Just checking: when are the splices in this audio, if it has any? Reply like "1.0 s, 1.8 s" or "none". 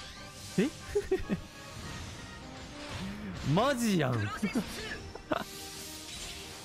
2.4 s